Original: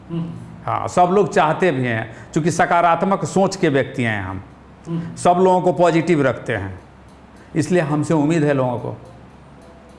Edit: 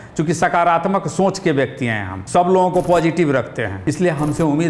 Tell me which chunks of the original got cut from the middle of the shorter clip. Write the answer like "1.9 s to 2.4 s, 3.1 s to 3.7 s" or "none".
4.3 s to 5.1 s, 6.6 s to 7.4 s